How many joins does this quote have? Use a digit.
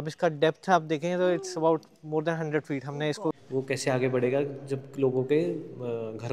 1